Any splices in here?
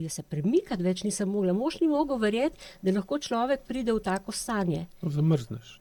no; 0 cuts

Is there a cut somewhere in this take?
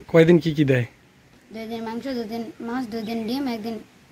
no; 0 cuts

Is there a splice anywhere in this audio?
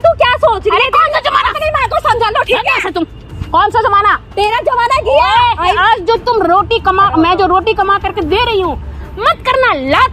yes; 1 cut; at 5.7 s

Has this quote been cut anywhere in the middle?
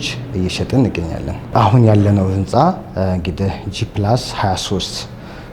yes; 1 cut; at 1.4 s

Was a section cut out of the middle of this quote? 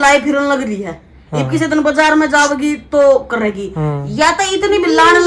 no; 0 cuts

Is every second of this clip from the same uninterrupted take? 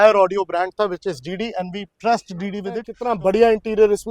no; 1 cut; at 2.9 s

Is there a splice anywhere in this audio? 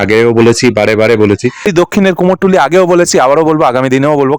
yes; 1 cut; at 1.9 s

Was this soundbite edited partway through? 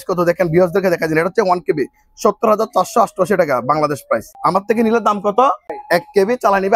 yes; 2 cuts; at 4.4 s, 5.7 s

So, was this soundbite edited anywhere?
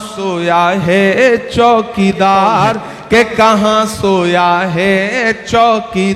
yes; 1 cut; at 2.9 s

